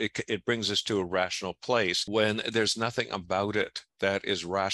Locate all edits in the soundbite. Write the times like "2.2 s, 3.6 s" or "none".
2.0 s